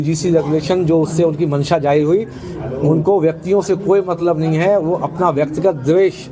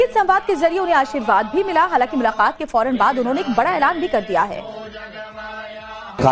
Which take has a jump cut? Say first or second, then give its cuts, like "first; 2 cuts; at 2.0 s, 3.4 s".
second; 1 cut; at 4.6 s